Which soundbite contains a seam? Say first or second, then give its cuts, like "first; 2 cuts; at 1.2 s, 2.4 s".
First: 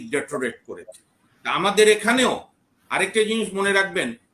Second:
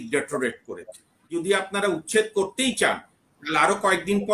second; 1 cut; at 1.3 s